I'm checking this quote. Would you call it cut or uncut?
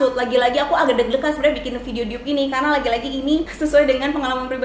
uncut